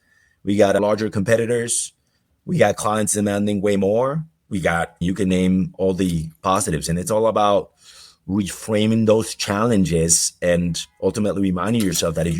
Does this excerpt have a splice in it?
yes; 2 cuts; at 0.8 s, 4.5 s

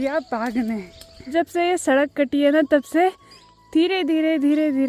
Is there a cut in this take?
yes; 1 cut; at 1.3 s

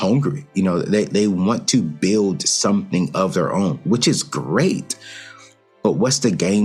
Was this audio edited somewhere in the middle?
no; 0 cuts

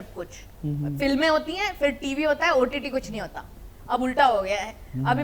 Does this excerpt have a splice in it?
no; 0 cuts

